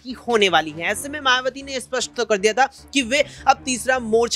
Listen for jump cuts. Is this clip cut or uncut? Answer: uncut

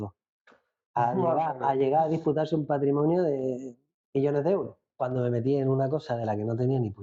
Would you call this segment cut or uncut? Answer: cut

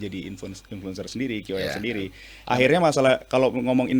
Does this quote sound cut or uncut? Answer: cut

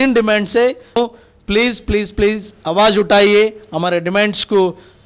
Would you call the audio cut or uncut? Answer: cut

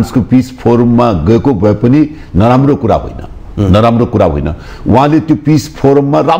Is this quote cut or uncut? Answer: uncut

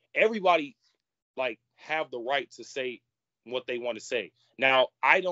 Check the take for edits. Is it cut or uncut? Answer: uncut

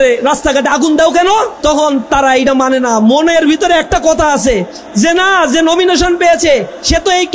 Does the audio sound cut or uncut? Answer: cut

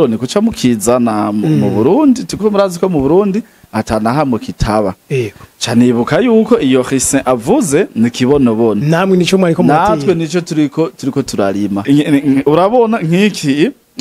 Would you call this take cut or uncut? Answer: cut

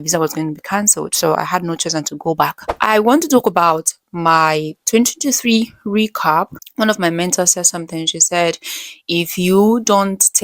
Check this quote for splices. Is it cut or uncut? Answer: cut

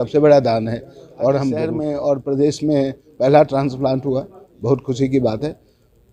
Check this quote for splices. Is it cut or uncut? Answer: cut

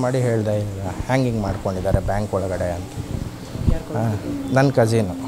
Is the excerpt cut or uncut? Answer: uncut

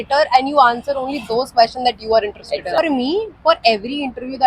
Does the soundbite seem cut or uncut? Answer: cut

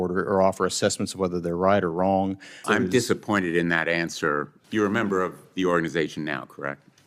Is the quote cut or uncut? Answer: cut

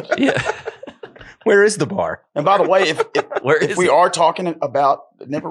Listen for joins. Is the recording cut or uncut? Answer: uncut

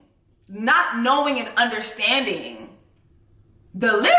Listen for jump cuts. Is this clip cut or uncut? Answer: uncut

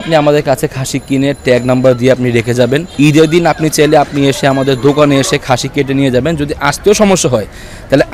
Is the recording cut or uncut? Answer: uncut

